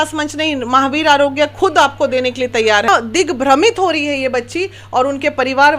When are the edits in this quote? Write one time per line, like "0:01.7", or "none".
0:02.9